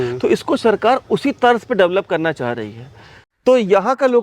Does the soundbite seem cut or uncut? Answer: cut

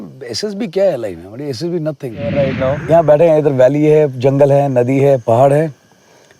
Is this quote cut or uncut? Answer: cut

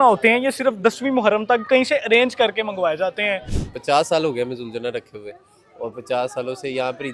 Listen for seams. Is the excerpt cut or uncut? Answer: cut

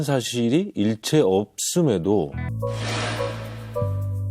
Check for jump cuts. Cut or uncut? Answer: cut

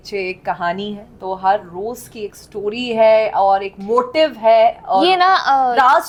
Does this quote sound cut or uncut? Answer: uncut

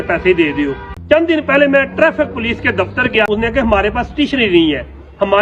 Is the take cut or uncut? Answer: cut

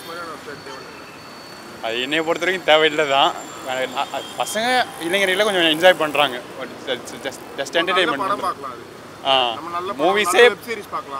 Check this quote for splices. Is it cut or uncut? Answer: uncut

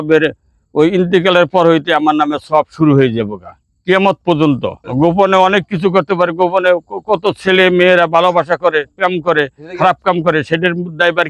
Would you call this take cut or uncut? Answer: cut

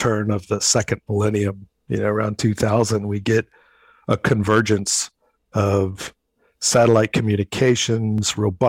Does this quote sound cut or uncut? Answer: uncut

